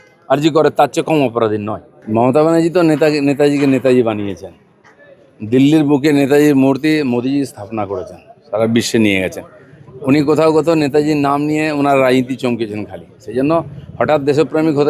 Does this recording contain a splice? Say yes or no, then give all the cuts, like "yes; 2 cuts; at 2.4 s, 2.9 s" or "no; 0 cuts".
yes; 1 cut; at 2.0 s